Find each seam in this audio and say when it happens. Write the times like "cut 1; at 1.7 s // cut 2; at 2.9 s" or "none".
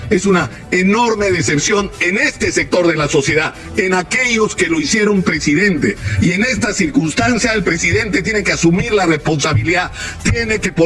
none